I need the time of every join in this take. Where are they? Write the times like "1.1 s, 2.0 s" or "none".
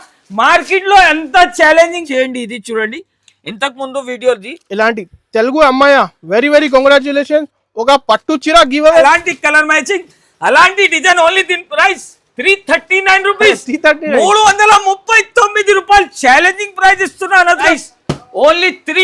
2.0 s, 9.0 s, 17.7 s

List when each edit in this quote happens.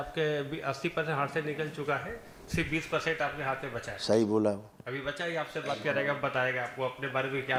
none

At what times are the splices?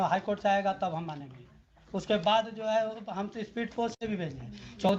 none

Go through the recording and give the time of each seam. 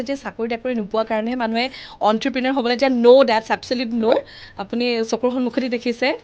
none

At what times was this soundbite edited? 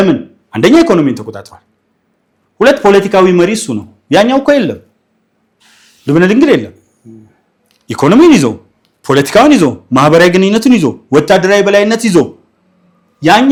none

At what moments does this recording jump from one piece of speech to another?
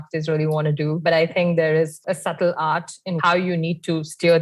1.0 s, 3.2 s

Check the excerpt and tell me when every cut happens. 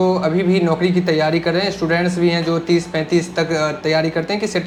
none

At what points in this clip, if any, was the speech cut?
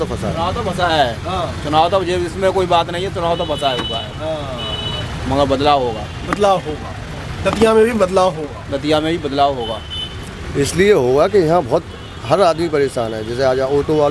none

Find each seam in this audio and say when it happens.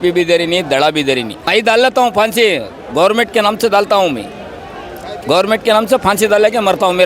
1.4 s

